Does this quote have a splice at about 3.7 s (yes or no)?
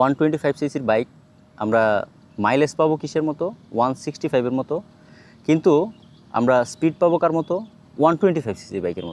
no